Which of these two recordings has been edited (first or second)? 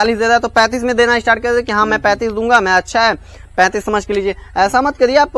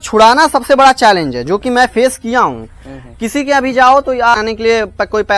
second